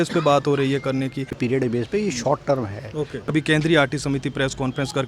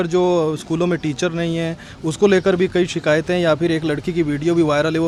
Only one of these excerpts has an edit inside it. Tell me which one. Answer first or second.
first